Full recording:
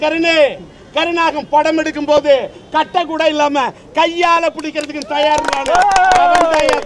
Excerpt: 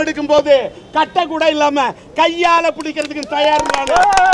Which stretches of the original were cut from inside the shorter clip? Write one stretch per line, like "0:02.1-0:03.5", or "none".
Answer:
none